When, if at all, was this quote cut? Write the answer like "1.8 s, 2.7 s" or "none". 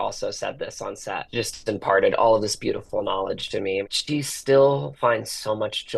1.3 s, 4.0 s